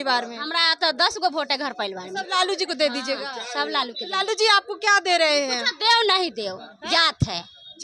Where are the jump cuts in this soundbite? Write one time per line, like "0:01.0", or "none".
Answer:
none